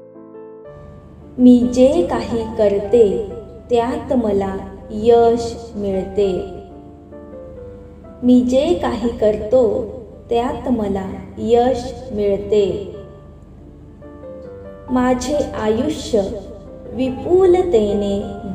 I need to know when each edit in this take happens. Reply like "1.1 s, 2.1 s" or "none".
0.9 s